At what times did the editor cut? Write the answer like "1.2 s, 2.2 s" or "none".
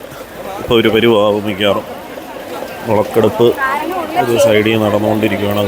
none

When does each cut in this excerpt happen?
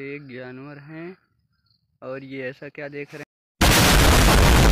3.4 s

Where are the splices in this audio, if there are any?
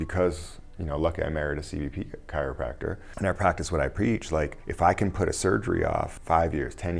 3.1 s, 4.6 s, 6.2 s

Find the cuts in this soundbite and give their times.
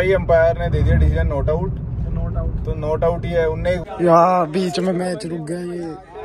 3.8 s

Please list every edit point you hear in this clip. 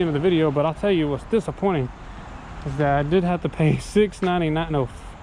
none

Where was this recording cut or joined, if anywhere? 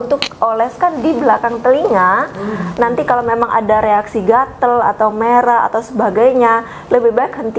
none

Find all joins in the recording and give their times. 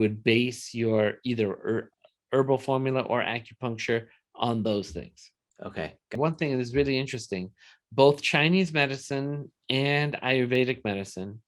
6.2 s

